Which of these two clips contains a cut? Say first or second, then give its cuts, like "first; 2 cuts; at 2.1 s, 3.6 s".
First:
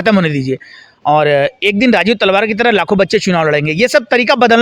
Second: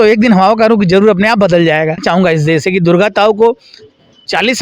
second; 1 cut; at 2.0 s